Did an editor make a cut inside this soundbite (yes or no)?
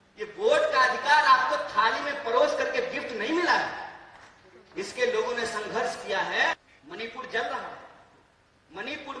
yes